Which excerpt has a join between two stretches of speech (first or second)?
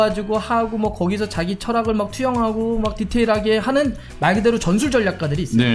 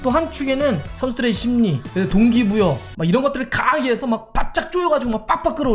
second